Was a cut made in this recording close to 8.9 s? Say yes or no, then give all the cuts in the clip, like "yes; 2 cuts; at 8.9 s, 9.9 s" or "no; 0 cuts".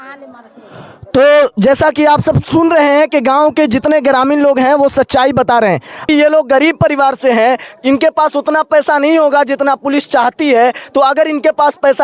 no; 1 cut; at 6.0 s